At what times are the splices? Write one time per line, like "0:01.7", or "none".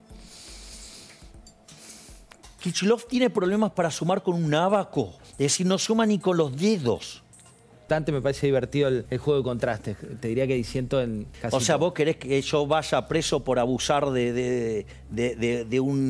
0:02.4
0:05.2
0:07.9
0:09.1
0:11.3